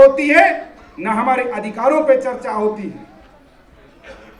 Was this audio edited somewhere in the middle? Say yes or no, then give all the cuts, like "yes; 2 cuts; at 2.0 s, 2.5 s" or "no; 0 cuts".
no; 0 cuts